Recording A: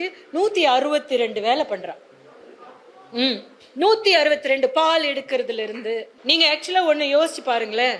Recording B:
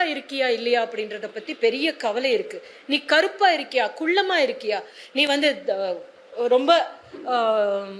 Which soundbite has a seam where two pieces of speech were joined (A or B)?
A